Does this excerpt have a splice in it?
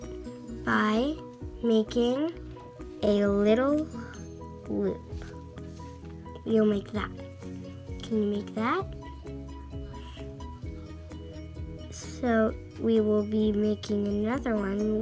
yes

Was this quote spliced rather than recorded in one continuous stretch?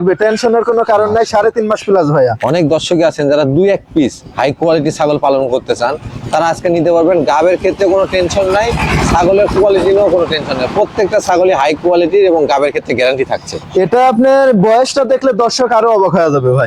no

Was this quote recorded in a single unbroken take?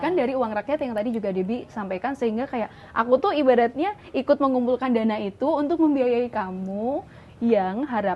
yes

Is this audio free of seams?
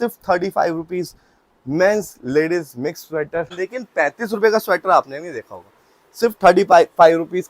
no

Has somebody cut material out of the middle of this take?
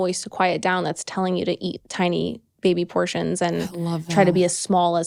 no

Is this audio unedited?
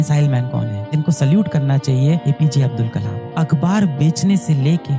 no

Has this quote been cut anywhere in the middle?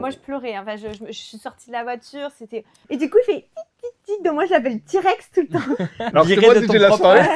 yes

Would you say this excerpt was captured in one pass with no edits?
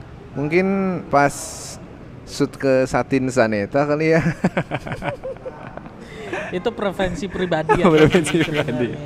yes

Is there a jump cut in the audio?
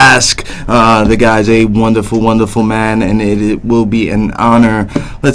no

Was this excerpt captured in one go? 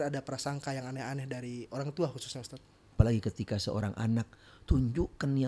no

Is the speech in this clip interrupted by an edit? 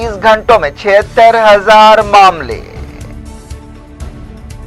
no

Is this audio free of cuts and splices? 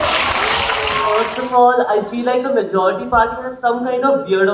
no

